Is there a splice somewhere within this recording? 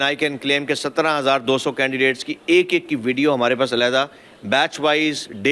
no; 0 cuts

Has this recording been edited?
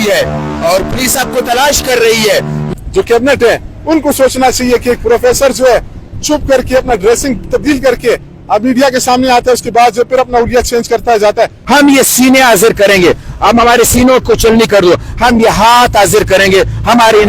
yes; 2 cuts; at 2.6 s, 11.6 s

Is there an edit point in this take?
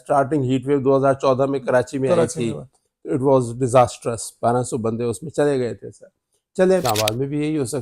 yes; 1 cut; at 6.8 s

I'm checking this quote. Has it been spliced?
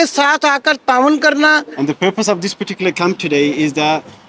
yes; 1 cut; at 1.7 s

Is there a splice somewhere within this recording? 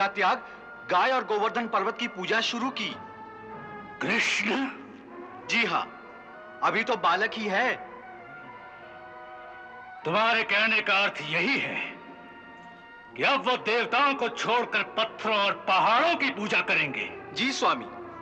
no; 0 cuts

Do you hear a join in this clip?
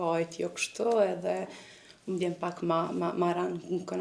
no; 0 cuts

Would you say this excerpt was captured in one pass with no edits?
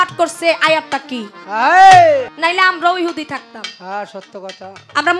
no; 1 cut; at 2.3 s

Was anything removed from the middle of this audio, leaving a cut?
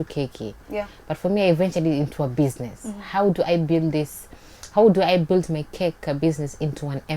no; 0 cuts

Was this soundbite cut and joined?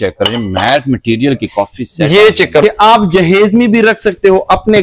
yes; 1 cut; at 2.6 s

